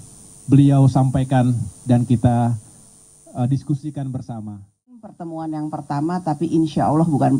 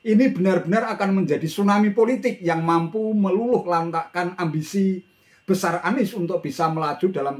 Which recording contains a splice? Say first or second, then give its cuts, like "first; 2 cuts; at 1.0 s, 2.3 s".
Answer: first; 1 cut; at 5.0 s